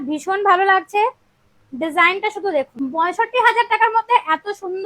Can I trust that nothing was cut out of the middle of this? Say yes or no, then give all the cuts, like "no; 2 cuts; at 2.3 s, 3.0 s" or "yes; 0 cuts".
no; 1 cut; at 2.8 s